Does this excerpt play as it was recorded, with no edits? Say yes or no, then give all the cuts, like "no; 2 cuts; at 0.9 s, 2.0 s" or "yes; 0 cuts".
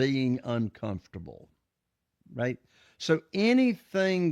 yes; 0 cuts